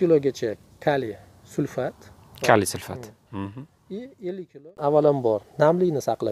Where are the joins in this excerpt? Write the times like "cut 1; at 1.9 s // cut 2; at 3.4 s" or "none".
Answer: cut 1; at 4.8 s

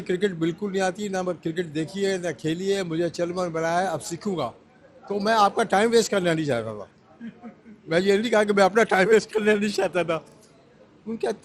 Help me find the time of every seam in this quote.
none

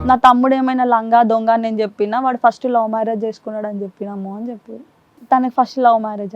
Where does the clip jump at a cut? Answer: cut 1; at 5.1 s

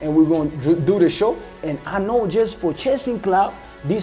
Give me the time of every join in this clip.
none

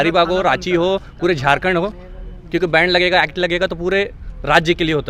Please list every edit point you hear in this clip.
none

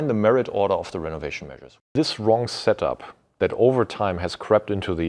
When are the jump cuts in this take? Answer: cut 1; at 1.8 s

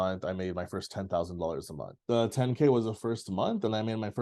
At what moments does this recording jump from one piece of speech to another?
cut 1; at 1.9 s

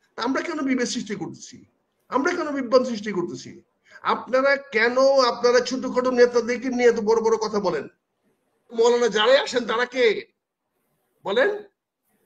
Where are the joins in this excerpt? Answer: cut 1; at 8.8 s

